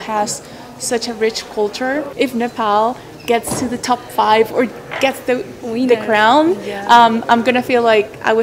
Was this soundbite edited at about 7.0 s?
no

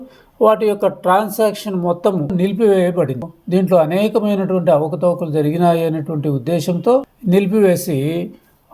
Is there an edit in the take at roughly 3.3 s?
yes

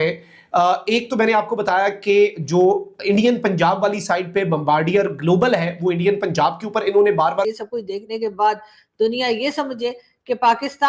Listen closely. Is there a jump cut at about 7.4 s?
yes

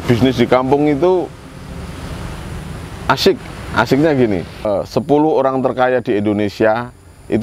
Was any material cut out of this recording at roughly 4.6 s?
yes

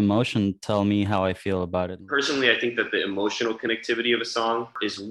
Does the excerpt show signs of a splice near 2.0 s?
yes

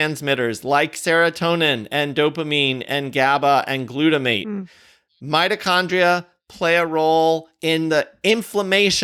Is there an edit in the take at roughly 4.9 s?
no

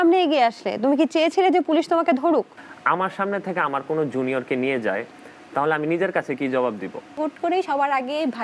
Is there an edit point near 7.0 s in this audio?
yes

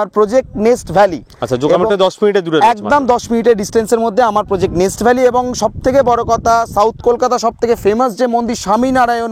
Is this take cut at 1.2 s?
no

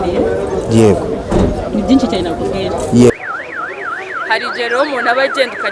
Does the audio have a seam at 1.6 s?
no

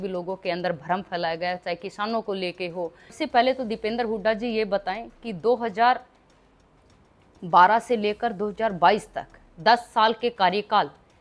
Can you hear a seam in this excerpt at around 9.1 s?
no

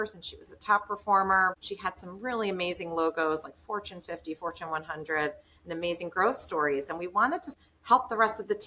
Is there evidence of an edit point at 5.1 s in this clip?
no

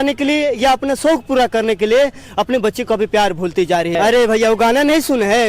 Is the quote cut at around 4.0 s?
yes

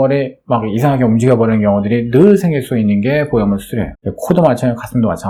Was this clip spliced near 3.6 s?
no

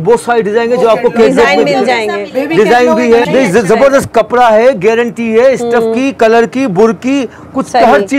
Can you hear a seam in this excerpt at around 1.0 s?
no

